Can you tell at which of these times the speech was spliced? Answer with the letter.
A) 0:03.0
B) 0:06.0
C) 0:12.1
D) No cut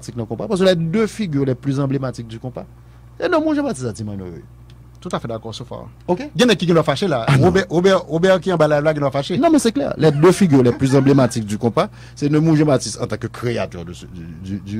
D